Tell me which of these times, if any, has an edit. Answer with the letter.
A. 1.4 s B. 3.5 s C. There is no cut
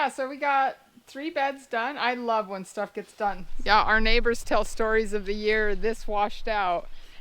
B